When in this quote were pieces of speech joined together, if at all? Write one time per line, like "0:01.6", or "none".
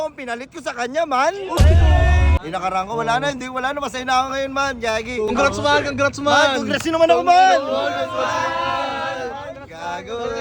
0:02.4
0:05.3